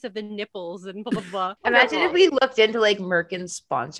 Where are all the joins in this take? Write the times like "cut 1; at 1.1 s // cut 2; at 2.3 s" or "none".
cut 1; at 1.5 s